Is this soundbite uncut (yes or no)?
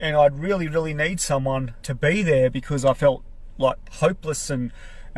no